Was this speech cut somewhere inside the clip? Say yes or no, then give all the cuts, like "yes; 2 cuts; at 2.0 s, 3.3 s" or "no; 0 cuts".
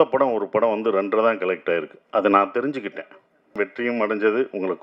yes; 1 cut; at 3.5 s